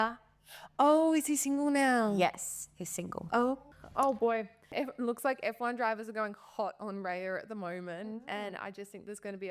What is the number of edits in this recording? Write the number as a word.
two